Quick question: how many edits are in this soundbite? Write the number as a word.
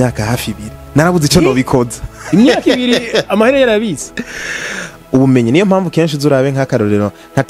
one